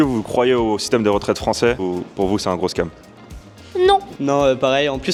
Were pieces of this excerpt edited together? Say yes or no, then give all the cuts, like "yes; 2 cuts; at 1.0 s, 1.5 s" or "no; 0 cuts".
no; 0 cuts